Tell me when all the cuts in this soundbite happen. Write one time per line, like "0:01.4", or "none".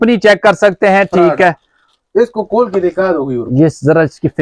none